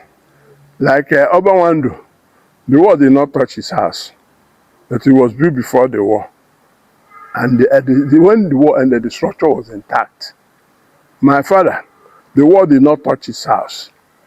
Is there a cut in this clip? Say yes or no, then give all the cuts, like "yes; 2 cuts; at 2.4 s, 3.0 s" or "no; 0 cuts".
no; 0 cuts